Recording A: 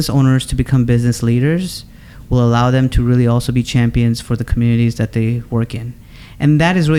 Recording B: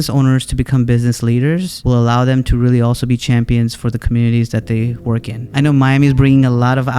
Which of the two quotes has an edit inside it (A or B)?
B